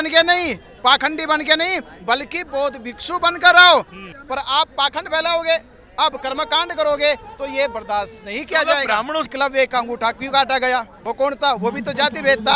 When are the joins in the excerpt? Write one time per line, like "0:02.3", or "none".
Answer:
0:04.1
0:09.3
0:11.0